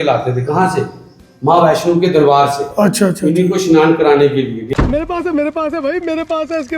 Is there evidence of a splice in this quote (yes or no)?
yes